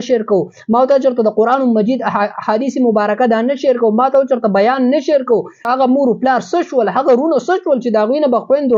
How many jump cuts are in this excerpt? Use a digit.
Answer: 1